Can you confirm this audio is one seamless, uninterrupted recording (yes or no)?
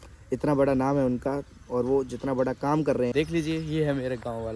no